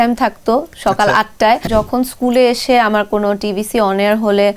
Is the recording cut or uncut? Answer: cut